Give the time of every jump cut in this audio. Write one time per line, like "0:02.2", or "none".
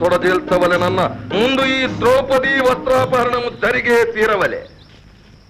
none